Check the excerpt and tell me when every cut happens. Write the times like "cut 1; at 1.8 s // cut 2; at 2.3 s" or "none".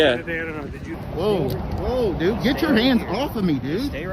cut 1; at 0.9 s